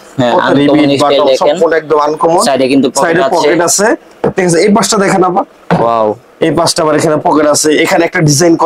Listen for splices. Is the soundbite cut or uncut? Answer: uncut